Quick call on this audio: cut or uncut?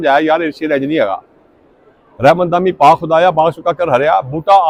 uncut